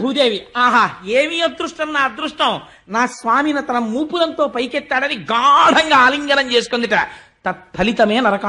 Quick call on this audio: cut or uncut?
uncut